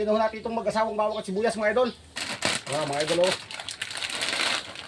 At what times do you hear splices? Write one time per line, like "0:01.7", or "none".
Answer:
0:01.7